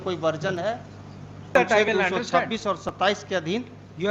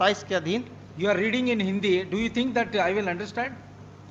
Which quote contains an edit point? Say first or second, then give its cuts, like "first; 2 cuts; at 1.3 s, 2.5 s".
first; 1 cut; at 1.5 s